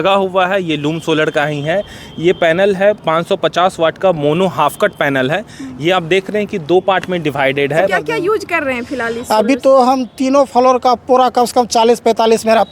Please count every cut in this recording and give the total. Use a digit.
1